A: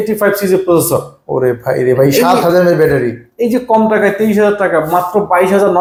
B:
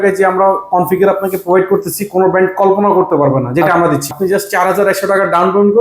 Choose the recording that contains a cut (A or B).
B